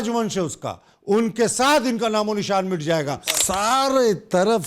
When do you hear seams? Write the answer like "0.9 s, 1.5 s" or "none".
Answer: 3.3 s

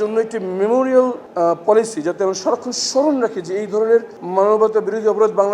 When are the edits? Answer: 1.2 s, 4.2 s

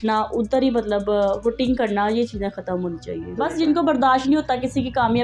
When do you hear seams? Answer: 3.2 s

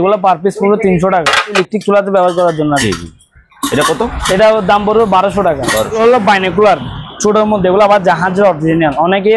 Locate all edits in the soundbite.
1.6 s, 5.9 s

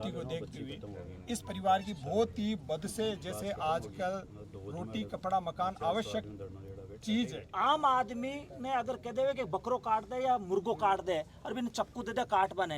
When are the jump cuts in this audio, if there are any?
7.4 s

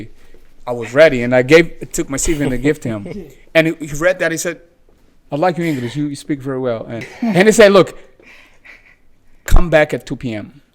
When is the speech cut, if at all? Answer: 7.1 s

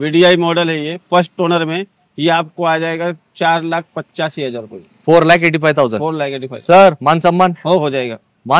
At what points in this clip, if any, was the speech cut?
none

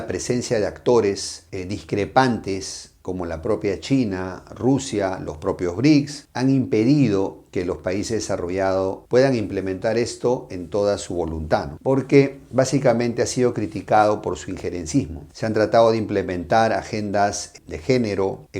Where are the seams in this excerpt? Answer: none

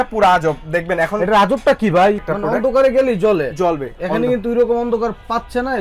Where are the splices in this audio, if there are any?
2.2 s

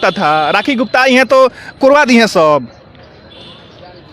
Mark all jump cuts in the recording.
none

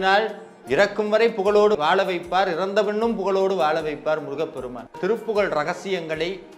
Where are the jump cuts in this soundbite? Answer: 5.0 s

